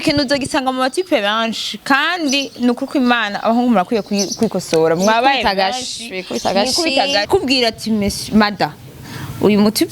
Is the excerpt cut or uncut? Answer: cut